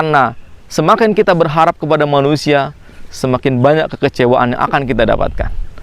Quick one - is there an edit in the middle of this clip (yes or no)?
no